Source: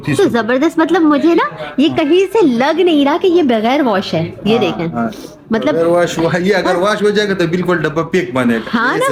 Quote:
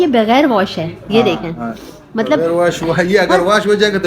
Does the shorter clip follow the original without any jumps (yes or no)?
yes